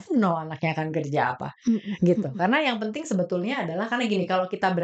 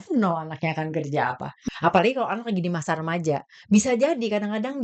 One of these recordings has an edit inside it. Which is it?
second; 1 cut; at 1.6 s

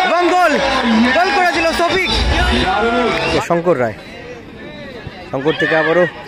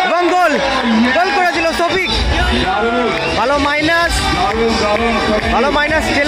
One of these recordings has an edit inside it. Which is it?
first; 1 cut; at 3.4 s

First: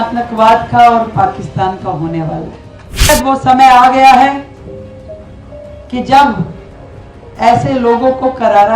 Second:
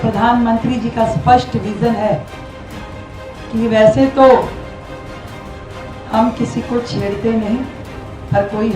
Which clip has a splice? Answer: first; 1 cut; at 3.1 s

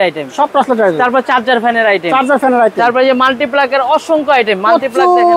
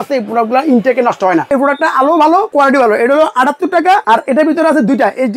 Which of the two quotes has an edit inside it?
second; 3 cuts; at 1.5 s, 2.5 s, 4.0 s

